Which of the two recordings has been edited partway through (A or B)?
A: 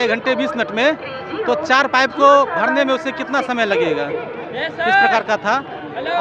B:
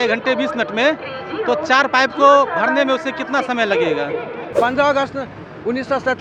B